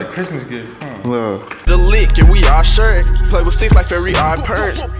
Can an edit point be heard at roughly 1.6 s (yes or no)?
yes